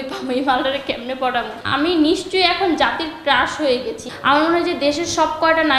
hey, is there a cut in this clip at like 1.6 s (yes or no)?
yes